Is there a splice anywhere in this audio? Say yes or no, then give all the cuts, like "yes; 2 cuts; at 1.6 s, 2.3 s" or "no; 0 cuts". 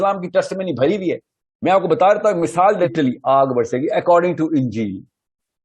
yes; 1 cut; at 2.9 s